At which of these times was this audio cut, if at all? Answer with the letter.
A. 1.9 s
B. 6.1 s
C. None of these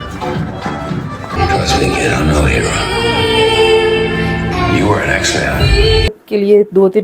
B